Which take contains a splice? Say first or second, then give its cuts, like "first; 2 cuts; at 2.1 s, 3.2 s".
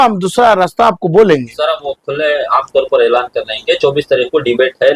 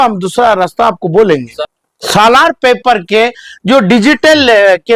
second; 1 cut; at 1.5 s